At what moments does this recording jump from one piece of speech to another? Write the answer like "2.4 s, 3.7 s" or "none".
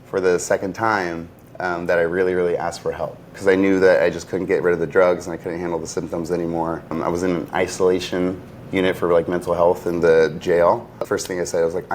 3.4 s, 6.9 s, 11.0 s